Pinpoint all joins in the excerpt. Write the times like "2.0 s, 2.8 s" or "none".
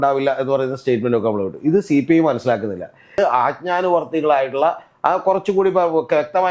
3.2 s